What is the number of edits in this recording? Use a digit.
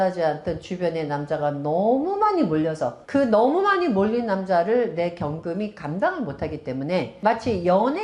2